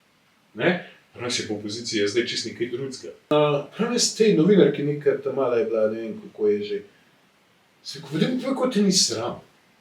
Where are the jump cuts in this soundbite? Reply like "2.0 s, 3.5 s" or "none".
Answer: 3.3 s